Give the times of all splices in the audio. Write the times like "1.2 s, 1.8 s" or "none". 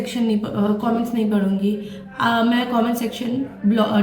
none